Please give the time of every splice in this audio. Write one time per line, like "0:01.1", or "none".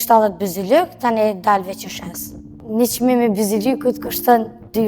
0:02.5